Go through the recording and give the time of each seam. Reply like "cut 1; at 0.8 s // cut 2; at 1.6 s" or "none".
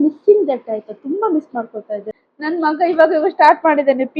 cut 1; at 2.2 s